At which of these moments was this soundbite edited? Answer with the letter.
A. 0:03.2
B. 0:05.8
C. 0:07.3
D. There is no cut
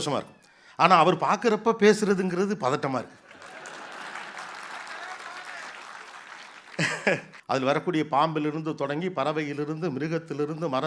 C